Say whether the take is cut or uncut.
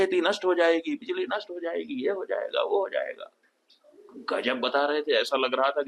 uncut